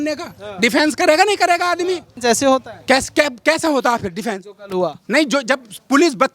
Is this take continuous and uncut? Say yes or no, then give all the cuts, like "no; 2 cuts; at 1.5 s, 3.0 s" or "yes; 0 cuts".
no; 1 cut; at 2.1 s